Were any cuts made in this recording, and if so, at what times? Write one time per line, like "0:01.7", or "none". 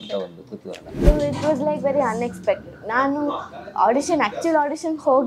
0:01.0